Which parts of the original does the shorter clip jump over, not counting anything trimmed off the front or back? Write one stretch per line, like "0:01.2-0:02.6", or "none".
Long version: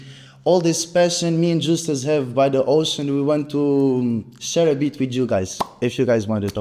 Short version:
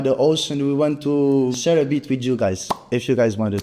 0:04.0-0:04.4